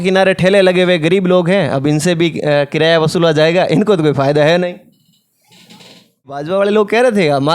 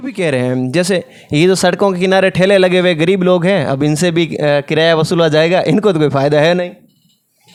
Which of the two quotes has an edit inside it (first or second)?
first